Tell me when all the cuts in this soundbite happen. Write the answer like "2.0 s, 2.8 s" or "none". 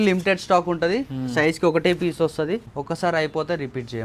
none